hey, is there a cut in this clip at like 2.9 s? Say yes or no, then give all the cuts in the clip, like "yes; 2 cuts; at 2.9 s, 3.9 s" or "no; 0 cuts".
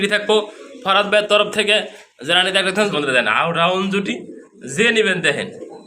yes; 1 cut; at 2.9 s